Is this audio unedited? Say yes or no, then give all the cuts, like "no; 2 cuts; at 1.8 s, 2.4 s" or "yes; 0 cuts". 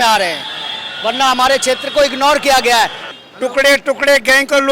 no; 1 cut; at 3.0 s